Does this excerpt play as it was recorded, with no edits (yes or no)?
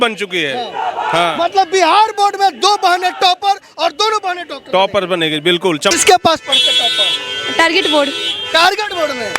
no